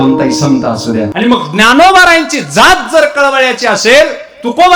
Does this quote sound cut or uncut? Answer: cut